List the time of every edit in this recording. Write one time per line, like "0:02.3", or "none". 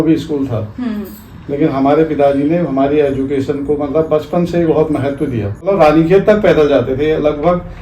0:05.6

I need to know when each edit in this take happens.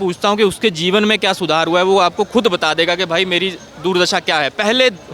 none

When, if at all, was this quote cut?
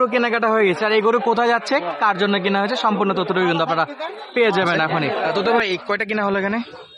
0:05.3

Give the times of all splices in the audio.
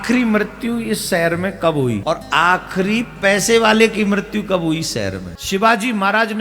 0:02.0
0:05.3

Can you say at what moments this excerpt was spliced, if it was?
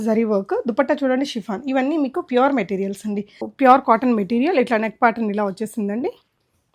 0:03.4

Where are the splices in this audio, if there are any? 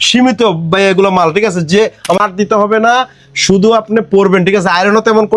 0:02.2

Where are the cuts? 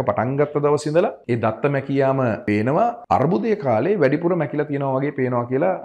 0:01.2
0:02.7

